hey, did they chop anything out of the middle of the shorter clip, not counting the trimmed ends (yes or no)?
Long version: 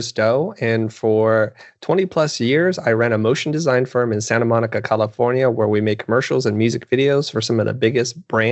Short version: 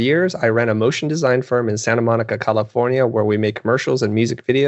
no